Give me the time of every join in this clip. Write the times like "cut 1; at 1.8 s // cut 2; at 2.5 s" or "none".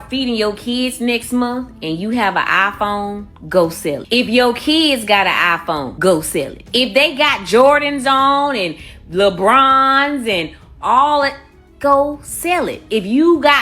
cut 1; at 4.0 s // cut 2; at 5.9 s // cut 3; at 6.6 s